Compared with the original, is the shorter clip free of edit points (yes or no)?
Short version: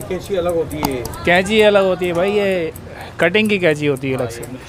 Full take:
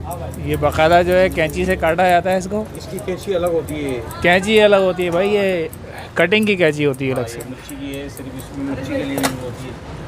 yes